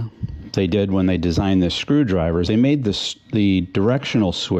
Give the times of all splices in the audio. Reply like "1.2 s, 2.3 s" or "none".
none